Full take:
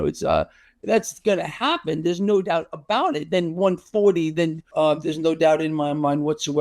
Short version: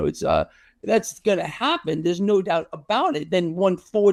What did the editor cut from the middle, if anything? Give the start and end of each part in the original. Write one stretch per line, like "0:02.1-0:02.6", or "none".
none